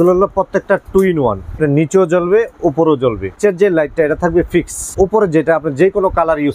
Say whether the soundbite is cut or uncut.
cut